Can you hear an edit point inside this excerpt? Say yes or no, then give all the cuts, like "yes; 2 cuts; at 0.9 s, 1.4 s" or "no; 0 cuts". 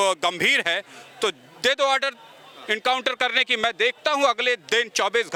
no; 0 cuts